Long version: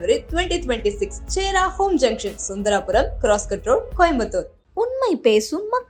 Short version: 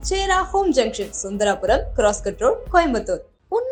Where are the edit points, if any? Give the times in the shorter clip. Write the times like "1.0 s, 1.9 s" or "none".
none

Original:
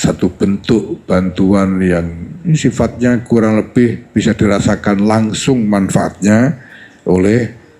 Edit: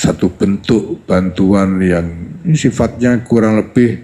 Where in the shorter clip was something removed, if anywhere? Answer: none

